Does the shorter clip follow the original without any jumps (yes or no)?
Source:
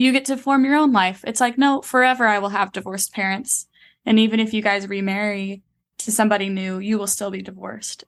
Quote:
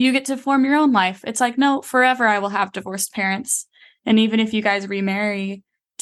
yes